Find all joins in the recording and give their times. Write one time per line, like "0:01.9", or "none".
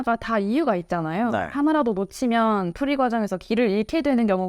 none

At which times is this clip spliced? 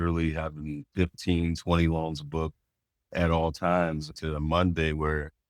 0:04.1

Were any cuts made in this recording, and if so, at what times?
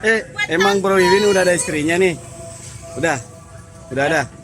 none

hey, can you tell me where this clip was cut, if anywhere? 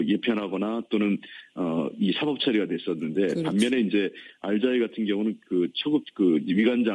0:05.9

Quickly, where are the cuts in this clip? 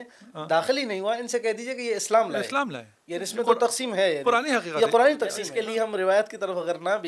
0:05.5

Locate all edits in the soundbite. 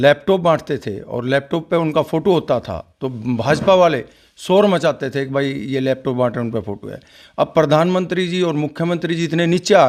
none

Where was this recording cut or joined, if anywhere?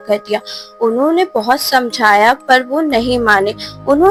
none

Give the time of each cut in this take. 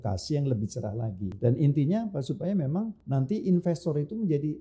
0:01.3
0:03.0

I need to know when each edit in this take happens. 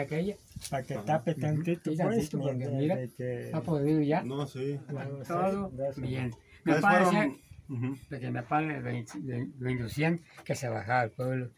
0:05.1

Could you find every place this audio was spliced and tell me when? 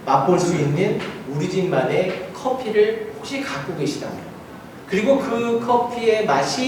none

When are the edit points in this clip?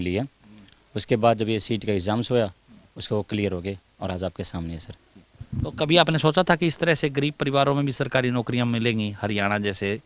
none

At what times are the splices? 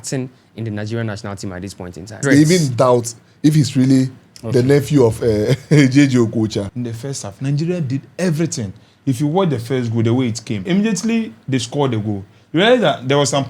0:02.2
0:06.7
0:10.6

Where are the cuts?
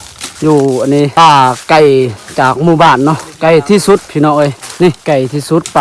0:01.1
0:05.0

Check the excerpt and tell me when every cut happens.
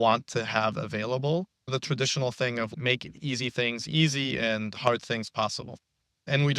0:01.7
0:02.7

